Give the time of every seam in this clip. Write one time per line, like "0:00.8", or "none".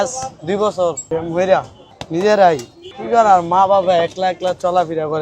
0:01.0
0:01.8